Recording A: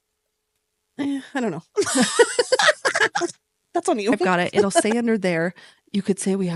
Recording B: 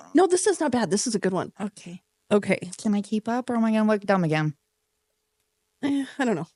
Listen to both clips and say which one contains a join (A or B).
A